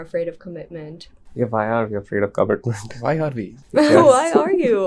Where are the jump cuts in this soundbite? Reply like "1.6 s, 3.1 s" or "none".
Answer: none